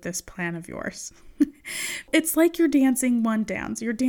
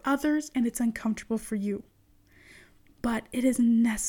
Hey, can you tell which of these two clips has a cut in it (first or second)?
first